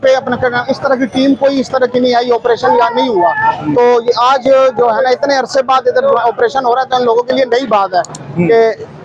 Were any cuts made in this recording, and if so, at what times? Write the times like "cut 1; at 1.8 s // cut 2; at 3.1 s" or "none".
none